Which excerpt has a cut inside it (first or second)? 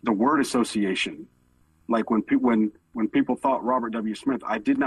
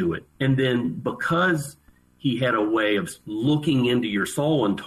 first